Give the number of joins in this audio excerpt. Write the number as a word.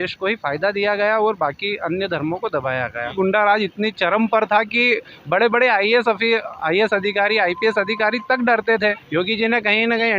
two